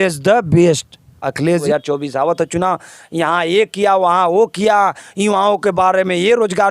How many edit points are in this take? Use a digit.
1